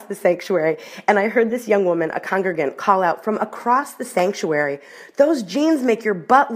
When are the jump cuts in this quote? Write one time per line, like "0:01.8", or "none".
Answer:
none